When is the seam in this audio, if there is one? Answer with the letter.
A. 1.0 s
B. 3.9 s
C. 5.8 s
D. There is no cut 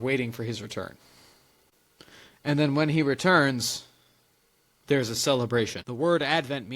C